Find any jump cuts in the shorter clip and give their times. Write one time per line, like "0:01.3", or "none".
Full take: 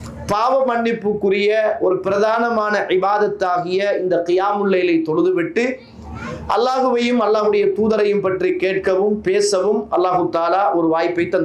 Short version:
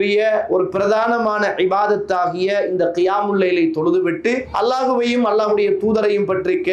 0:04.5